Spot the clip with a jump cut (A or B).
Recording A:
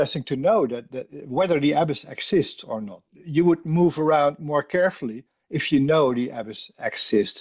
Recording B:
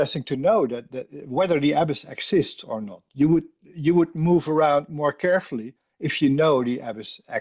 A